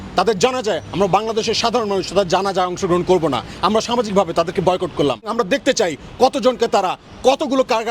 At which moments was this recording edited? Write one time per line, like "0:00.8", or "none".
0:05.3